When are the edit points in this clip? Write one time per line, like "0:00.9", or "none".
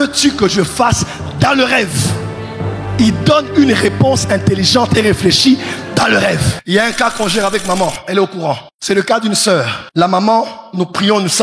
0:06.5
0:08.7
0:09.8